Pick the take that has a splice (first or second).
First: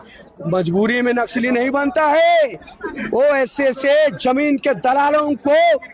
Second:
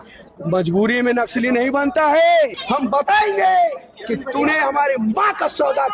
second